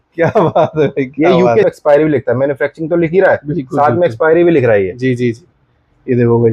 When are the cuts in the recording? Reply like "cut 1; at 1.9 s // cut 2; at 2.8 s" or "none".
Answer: cut 1; at 1.7 s